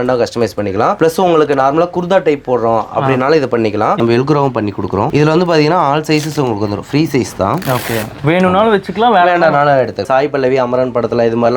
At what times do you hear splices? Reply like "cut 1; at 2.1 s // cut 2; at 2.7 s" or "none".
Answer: cut 1; at 1.0 s // cut 2; at 4.0 s // cut 3; at 5.1 s // cut 4; at 8.2 s // cut 5; at 10.0 s